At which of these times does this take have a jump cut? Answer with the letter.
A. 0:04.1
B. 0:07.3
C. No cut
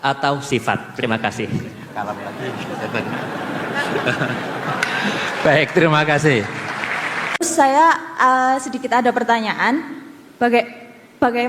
B